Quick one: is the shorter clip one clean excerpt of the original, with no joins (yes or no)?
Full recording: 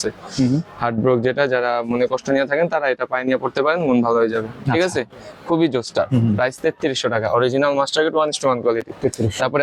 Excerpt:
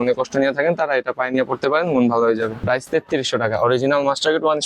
no